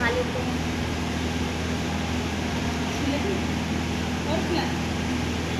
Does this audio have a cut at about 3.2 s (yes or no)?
no